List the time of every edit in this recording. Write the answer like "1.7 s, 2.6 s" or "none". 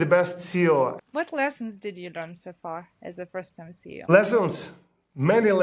1.0 s, 4.1 s